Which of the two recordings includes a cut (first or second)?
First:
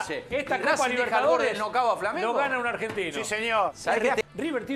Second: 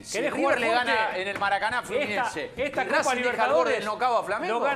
first